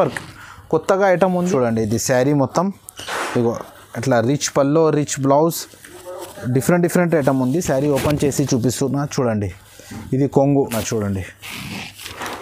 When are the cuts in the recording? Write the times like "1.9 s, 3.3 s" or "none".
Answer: 1.4 s, 10.7 s